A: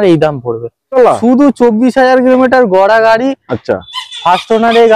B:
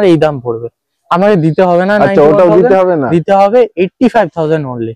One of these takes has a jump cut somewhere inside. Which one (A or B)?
A